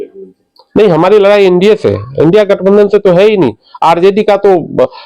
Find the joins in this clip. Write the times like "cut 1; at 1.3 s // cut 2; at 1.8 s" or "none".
none